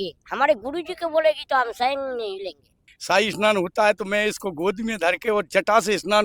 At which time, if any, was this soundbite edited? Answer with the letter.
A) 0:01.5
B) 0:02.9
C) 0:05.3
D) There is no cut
B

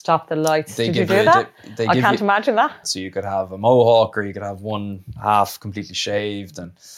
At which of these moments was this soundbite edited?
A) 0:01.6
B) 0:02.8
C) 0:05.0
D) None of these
B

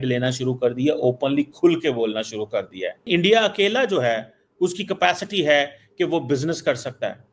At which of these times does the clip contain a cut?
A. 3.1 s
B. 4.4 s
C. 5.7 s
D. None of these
A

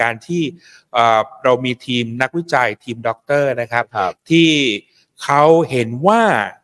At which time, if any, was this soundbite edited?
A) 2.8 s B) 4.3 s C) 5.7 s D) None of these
D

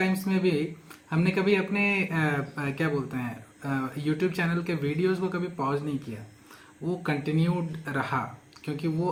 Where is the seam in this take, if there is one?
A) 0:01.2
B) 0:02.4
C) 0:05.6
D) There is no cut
D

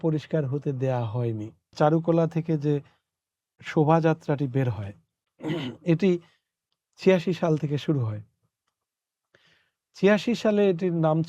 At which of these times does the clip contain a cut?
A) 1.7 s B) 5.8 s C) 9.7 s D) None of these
A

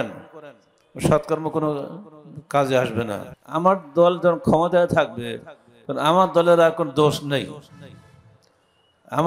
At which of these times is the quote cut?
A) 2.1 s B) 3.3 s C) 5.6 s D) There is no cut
B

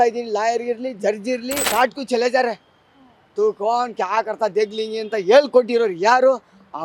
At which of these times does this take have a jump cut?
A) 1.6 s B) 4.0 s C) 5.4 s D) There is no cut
A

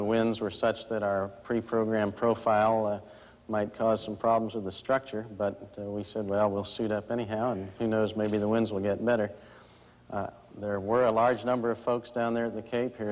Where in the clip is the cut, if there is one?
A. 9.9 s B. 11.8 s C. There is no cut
C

